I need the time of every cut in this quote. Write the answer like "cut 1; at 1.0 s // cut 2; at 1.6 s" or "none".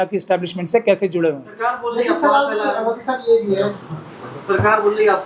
none

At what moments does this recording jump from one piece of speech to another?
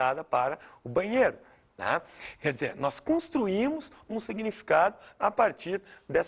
cut 1; at 5.1 s

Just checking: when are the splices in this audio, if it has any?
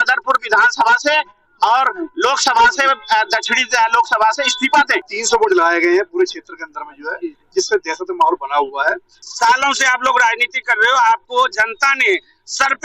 cut 1; at 5.1 s // cut 2; at 9.2 s

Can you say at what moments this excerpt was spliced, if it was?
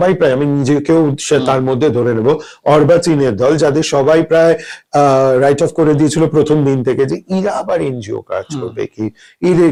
none

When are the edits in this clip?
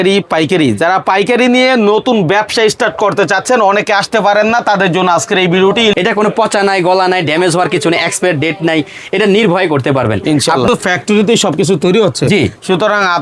cut 1; at 5.9 s // cut 2; at 10.7 s

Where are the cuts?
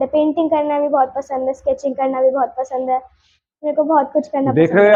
none

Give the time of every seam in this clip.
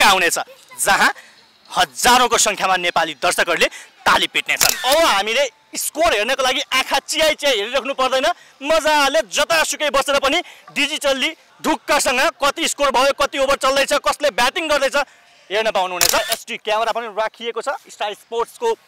cut 1; at 4.8 s // cut 2; at 16.2 s

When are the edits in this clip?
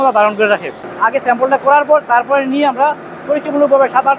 cut 1; at 1.1 s

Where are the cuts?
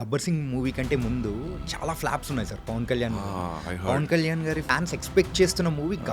cut 1; at 4.7 s

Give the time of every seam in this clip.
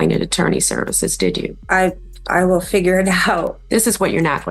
cut 1; at 1.6 s // cut 2; at 3.6 s

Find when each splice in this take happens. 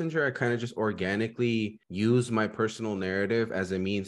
cut 1; at 1.8 s

